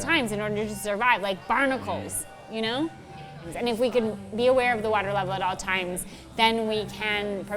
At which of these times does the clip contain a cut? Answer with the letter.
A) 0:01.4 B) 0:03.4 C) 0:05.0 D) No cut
B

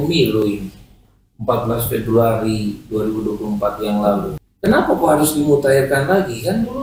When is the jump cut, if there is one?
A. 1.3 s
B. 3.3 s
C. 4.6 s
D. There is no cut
D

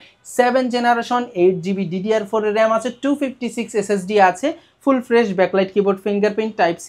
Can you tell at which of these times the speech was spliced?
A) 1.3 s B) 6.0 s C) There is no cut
C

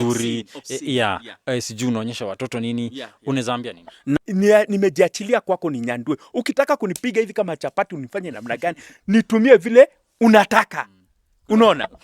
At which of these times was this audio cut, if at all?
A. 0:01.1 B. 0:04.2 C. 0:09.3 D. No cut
B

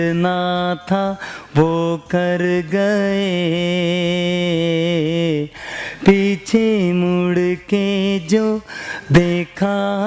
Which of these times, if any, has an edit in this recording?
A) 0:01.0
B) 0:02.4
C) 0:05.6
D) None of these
D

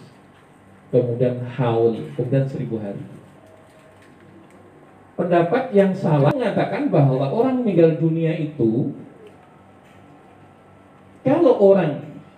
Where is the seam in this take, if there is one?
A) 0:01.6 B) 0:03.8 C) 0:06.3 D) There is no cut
C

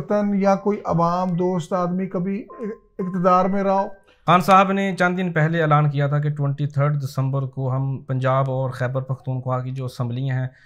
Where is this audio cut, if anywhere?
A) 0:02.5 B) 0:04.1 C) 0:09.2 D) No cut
B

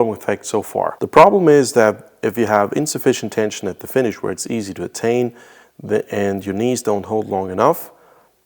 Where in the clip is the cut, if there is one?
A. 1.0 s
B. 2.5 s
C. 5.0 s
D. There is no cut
A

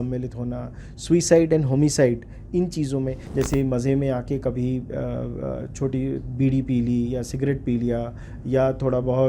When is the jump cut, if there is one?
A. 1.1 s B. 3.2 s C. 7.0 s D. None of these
B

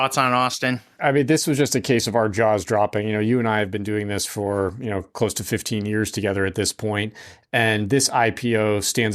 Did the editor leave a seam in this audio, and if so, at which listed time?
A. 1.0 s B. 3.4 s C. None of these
A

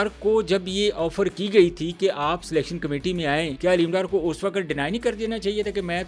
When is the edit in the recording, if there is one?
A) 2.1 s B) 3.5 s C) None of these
B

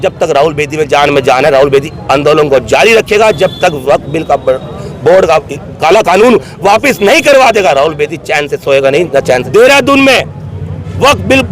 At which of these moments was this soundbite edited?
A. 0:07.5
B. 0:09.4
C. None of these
B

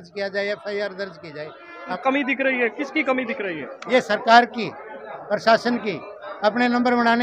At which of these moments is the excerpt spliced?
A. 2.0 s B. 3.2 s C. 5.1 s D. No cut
A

